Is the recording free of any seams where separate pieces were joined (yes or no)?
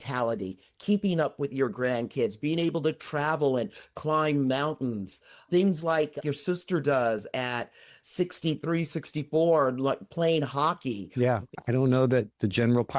no